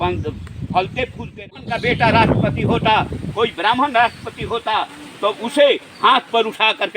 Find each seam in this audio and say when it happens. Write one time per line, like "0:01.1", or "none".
0:01.5